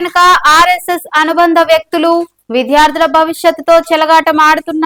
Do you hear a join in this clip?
no; 0 cuts

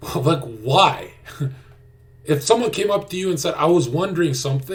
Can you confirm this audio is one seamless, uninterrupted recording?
yes; 0 cuts

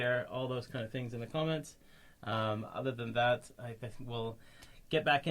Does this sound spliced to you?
no; 0 cuts

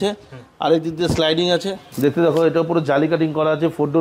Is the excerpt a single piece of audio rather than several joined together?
no; 1 cut; at 1.8 s

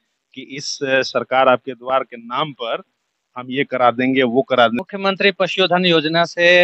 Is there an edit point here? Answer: yes; 1 cut; at 4.8 s

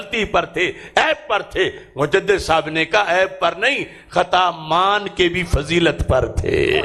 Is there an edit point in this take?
no; 0 cuts

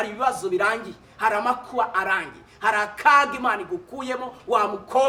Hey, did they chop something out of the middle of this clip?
no; 0 cuts

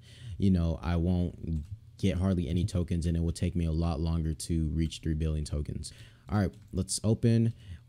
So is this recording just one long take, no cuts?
no; 1 cut; at 5.9 s

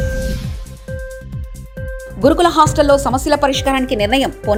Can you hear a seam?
no; 0 cuts

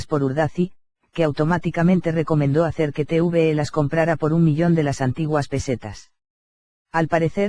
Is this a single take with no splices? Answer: yes; 0 cuts

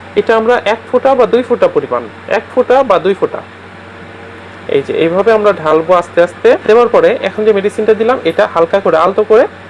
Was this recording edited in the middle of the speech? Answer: yes; 1 cut; at 6.6 s

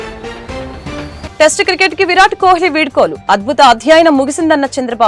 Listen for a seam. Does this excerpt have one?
yes; 1 cut; at 1.2 s

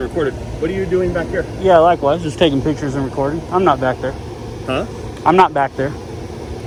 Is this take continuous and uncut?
yes; 0 cuts

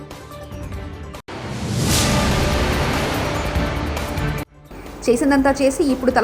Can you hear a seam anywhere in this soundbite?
yes; 2 cuts; at 1.2 s, 4.5 s

